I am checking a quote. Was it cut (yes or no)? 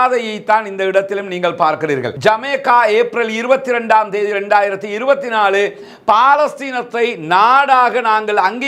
yes